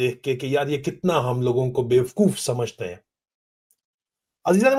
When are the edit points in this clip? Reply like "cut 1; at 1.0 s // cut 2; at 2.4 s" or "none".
none